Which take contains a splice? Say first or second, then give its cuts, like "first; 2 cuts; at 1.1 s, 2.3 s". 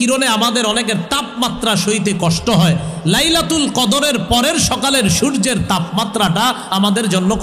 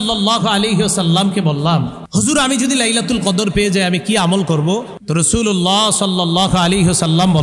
second; 2 cuts; at 2.0 s, 5.0 s